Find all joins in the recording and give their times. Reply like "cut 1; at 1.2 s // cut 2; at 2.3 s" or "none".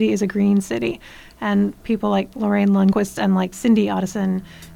cut 1; at 3.3 s